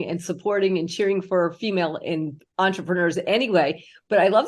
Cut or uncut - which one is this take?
uncut